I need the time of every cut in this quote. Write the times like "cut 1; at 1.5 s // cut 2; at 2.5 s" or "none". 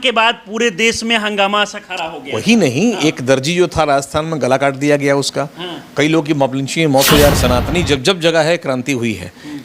cut 1; at 7.3 s